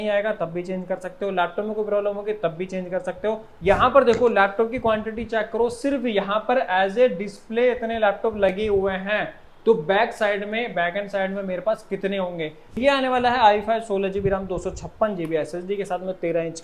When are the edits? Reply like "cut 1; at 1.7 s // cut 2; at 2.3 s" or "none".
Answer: cut 1; at 3.5 s // cut 2; at 12.8 s